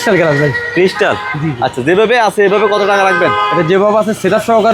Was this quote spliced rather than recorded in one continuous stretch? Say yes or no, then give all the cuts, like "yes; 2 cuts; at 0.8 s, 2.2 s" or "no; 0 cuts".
no; 0 cuts